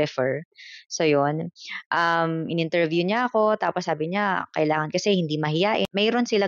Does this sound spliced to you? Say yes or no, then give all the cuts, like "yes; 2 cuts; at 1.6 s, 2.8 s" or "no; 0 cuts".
no; 0 cuts